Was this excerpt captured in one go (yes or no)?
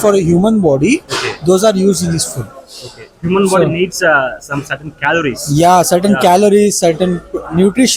yes